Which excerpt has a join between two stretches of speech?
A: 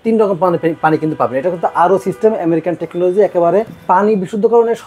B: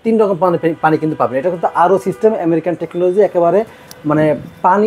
A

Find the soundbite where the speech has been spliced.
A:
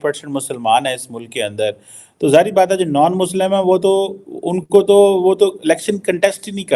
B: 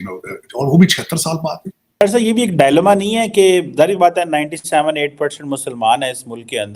B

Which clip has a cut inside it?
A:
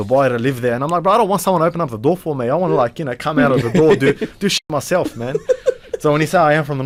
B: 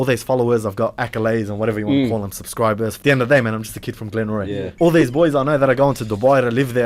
B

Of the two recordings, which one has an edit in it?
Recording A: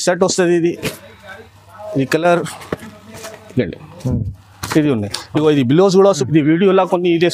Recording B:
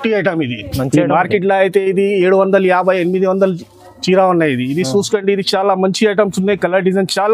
A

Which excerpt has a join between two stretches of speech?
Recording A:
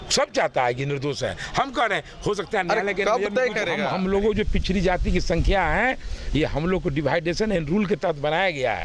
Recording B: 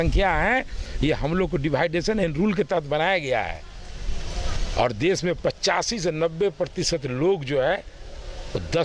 A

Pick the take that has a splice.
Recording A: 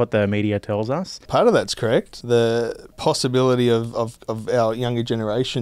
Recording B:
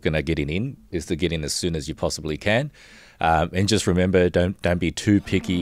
A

